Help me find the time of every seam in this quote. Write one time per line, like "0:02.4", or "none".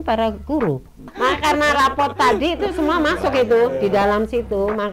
0:01.1